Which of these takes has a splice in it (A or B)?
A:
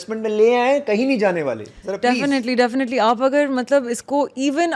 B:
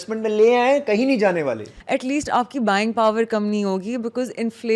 B